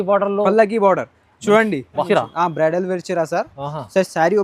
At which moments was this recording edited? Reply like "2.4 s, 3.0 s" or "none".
2.1 s

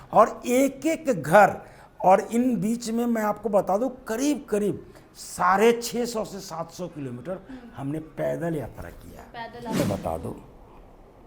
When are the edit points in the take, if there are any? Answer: 9.7 s

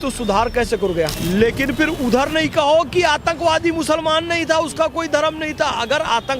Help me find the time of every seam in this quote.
1.1 s

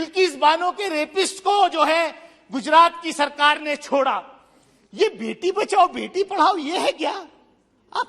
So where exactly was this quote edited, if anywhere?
none

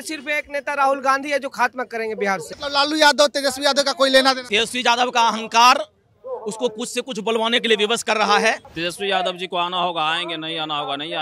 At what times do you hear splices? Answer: 2.5 s, 4.4 s, 8.7 s

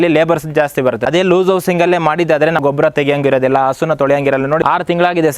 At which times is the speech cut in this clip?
1.0 s, 2.6 s, 4.6 s

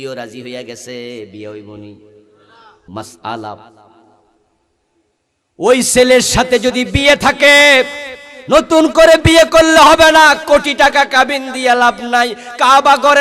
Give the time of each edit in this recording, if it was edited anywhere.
2.9 s

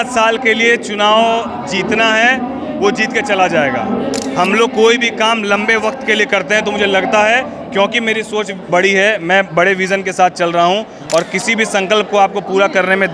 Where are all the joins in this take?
none

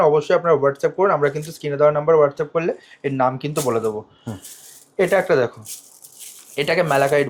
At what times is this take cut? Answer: none

